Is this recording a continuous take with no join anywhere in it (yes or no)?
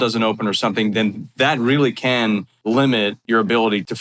no